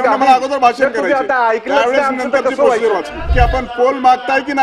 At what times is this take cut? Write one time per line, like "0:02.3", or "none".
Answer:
0:03.3